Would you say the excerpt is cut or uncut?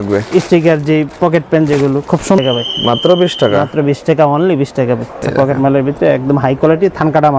cut